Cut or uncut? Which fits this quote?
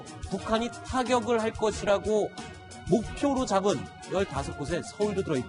cut